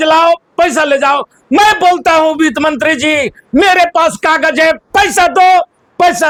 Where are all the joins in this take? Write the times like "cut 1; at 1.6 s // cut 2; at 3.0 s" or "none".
none